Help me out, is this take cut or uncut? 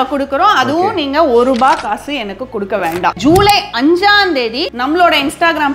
cut